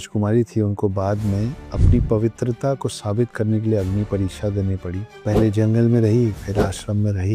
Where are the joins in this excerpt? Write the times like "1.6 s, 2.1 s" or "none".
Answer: none